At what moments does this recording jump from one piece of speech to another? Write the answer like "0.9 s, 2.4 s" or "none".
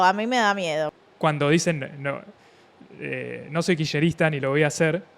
0.9 s